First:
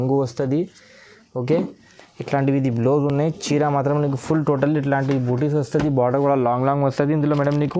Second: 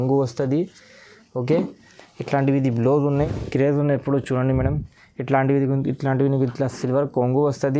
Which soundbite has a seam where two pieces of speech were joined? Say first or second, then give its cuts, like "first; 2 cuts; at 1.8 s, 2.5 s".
second; 1 cut; at 3.1 s